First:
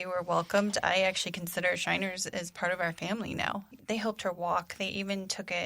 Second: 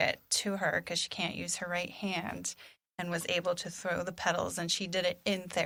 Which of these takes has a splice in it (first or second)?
first